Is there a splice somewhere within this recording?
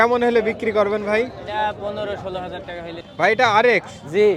yes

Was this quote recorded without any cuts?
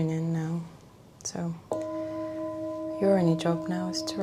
yes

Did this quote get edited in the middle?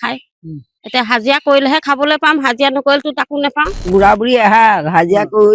yes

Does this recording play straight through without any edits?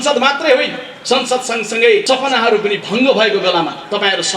no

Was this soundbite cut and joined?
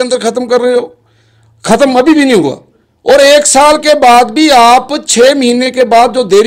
no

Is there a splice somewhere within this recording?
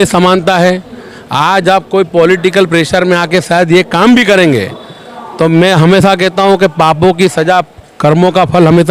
no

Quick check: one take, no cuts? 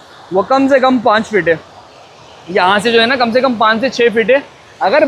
yes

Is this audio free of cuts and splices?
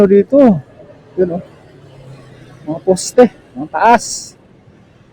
yes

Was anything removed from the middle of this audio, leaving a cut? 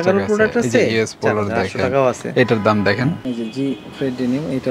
yes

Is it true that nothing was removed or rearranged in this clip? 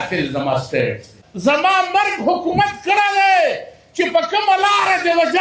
no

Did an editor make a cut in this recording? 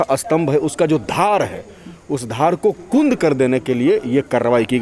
no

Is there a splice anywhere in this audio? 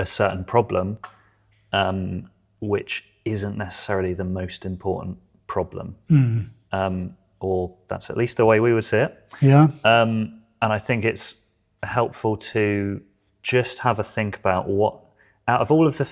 no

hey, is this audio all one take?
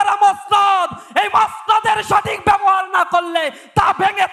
yes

